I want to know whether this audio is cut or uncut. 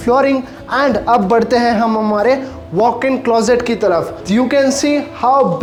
uncut